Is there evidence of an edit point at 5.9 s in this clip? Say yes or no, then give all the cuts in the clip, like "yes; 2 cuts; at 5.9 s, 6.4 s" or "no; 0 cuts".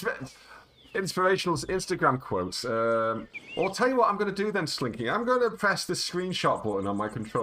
no; 1 cut; at 3.4 s